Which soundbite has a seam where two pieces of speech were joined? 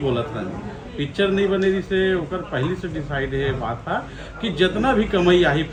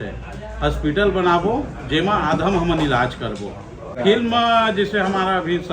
second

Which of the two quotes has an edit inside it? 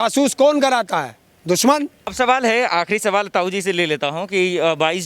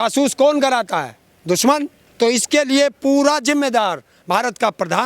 second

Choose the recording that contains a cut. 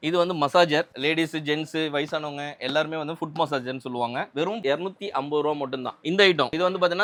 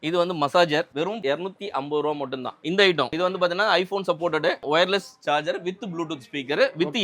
second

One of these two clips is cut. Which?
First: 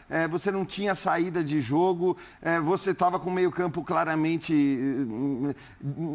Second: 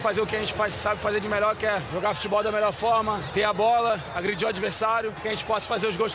second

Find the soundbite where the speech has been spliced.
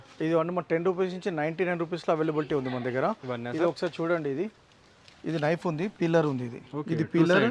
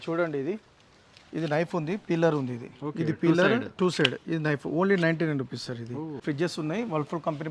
second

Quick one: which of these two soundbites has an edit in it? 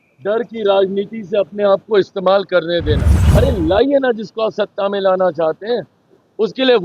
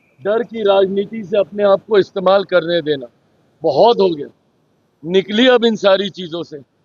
first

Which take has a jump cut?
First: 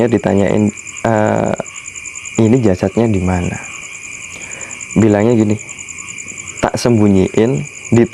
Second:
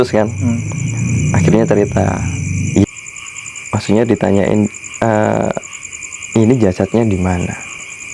second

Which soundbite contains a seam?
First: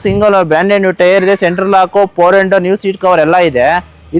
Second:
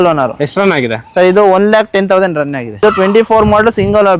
second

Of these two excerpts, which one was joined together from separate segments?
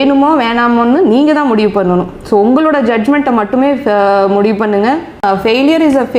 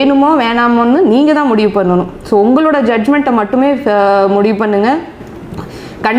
first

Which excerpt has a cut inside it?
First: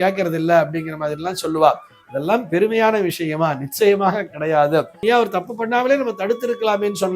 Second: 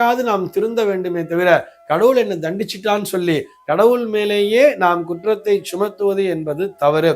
first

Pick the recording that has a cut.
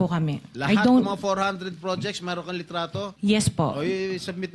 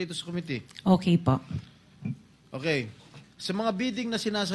first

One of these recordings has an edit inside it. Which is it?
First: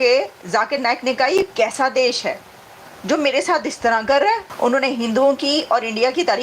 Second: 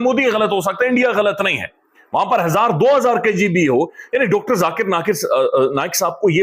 first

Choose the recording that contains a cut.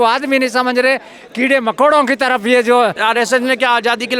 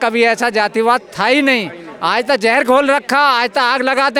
first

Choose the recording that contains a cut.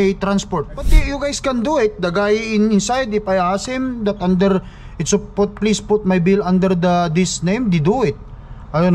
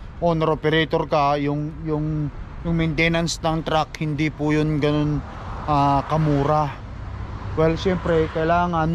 first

